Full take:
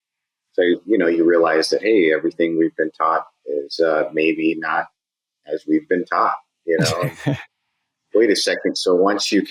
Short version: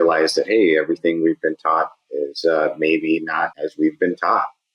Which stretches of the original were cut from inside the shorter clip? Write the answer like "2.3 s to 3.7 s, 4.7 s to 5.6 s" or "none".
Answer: 4.9 s to 5.4 s